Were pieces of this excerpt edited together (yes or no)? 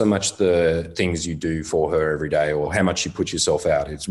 yes